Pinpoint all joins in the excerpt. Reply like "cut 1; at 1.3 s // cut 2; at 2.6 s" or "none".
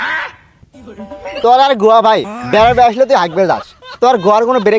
cut 1; at 1.4 s